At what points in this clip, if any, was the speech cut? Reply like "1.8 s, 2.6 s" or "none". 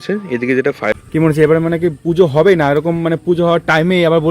1.0 s